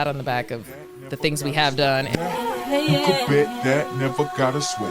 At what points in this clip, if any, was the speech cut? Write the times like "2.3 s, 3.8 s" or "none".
2.1 s